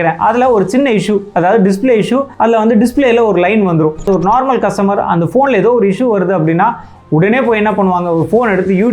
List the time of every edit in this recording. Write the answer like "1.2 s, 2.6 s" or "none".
2.3 s, 4.1 s, 6.9 s